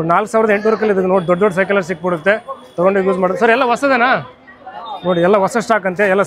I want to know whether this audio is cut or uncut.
uncut